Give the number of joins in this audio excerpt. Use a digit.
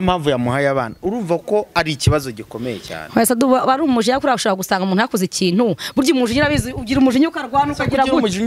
0